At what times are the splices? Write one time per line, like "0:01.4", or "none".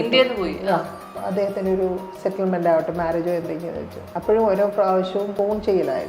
0:01.1
0:04.1
0:05.3